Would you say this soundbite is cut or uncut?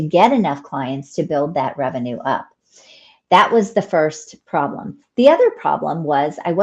uncut